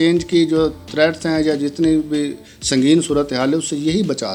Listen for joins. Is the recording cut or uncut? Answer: uncut